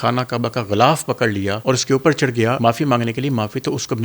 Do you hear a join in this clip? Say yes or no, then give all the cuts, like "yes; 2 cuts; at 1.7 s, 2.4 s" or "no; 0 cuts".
yes; 2 cuts; at 1.5 s, 2.6 s